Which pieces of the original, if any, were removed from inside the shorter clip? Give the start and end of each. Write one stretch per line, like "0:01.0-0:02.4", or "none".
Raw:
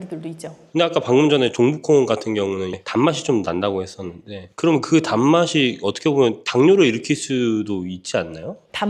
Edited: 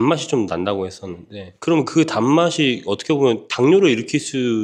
none